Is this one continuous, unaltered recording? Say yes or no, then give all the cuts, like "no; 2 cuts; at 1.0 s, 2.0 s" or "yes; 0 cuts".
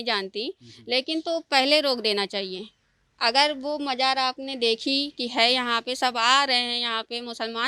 yes; 0 cuts